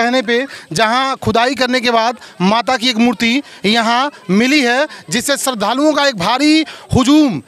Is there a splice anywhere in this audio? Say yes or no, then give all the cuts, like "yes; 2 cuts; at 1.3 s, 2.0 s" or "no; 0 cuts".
no; 0 cuts